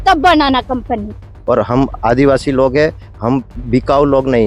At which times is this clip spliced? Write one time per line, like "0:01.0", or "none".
0:01.3